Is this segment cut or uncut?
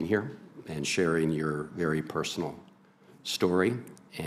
cut